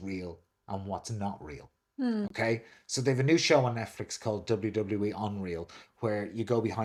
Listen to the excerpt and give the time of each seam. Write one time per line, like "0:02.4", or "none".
none